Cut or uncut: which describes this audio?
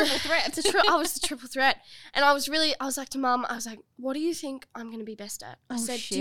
cut